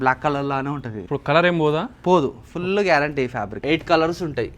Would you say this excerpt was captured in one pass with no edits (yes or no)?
no